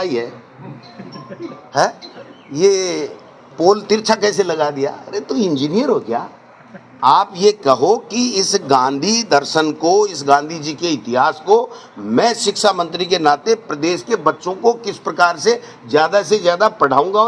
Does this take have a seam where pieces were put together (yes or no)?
no